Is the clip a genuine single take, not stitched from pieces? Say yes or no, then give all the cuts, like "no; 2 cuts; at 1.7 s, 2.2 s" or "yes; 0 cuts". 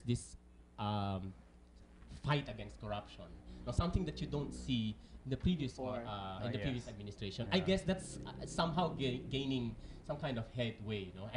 no; 1 cut; at 7.0 s